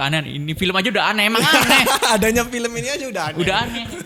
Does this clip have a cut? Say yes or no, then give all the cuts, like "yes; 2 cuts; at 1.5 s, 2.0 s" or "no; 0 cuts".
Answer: no; 0 cuts